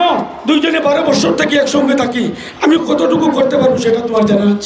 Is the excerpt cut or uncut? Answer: uncut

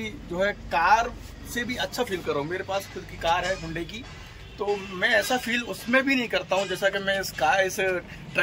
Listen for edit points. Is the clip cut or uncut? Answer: uncut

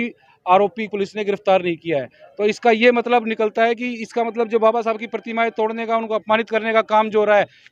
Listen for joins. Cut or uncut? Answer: uncut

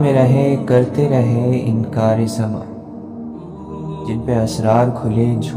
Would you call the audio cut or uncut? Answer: cut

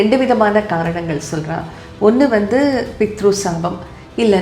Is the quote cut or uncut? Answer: uncut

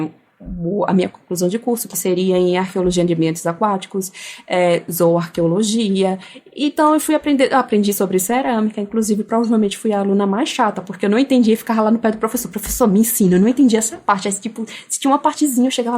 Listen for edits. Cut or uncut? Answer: uncut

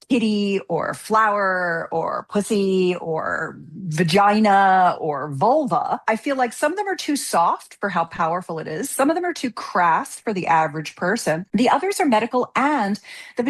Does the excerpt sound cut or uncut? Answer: cut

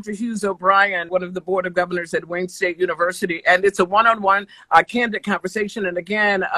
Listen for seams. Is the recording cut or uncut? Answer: cut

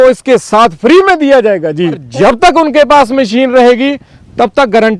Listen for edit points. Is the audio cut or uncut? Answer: cut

